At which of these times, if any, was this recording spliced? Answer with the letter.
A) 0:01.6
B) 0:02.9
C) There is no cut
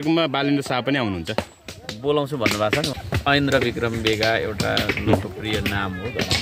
B